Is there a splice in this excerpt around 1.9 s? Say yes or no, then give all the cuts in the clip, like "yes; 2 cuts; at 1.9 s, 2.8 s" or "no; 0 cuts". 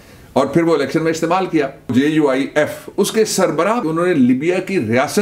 yes; 2 cuts; at 1.9 s, 3.8 s